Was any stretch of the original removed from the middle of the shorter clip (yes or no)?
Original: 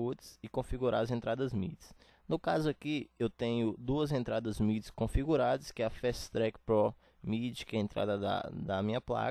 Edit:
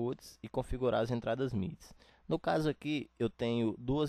no